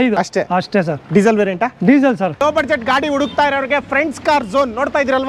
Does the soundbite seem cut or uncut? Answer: cut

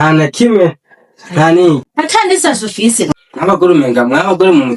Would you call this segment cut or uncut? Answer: cut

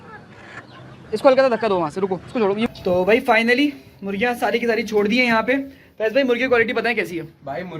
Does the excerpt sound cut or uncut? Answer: cut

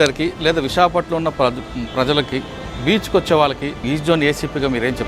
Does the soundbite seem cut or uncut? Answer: cut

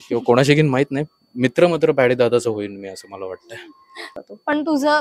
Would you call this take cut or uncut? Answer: cut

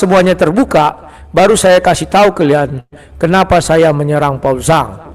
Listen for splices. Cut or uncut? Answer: uncut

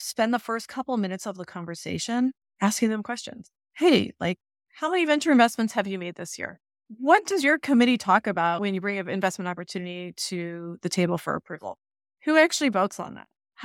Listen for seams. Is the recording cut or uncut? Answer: cut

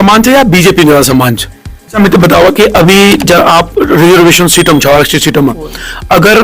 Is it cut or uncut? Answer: cut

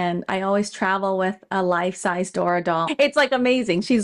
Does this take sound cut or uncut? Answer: cut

